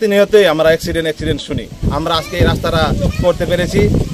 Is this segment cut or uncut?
cut